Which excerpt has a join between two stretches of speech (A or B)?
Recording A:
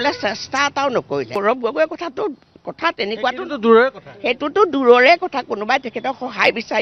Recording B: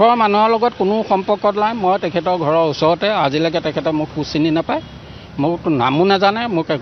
A